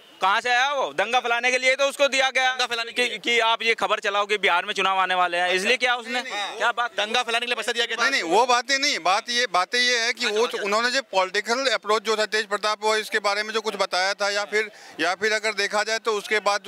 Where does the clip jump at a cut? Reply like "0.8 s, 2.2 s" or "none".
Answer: none